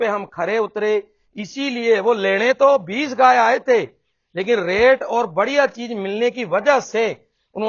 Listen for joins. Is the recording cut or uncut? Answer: uncut